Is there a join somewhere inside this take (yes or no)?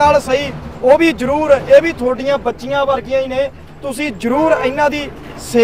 no